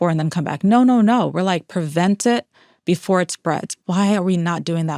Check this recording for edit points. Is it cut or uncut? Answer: cut